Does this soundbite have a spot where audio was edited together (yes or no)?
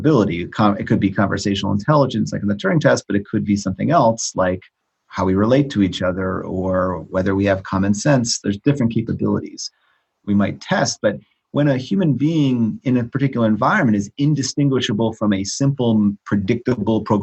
no